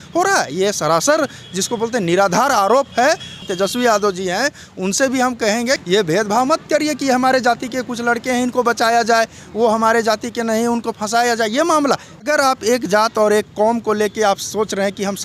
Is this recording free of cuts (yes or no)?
no